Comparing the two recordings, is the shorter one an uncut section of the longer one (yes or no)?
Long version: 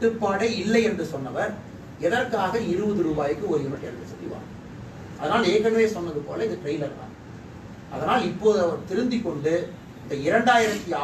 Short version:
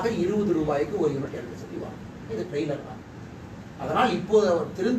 no